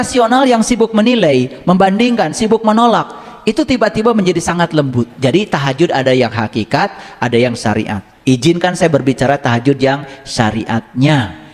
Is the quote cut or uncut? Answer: cut